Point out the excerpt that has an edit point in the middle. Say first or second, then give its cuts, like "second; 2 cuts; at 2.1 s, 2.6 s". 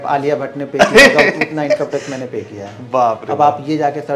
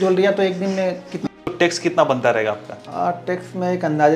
second; 2 cuts; at 1.2 s, 2.8 s